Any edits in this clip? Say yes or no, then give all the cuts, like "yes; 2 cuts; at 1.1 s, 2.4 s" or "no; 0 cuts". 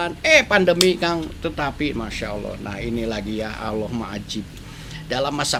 no; 0 cuts